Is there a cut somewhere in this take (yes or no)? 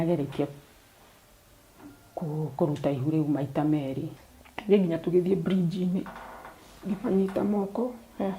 yes